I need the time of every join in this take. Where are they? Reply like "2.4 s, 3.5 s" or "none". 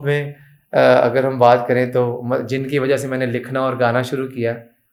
none